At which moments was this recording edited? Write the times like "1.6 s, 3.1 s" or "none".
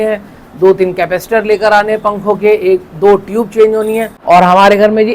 4.1 s